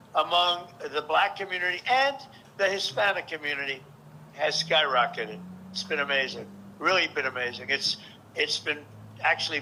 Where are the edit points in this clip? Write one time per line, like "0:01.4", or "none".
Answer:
none